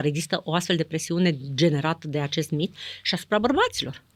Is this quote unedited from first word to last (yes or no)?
yes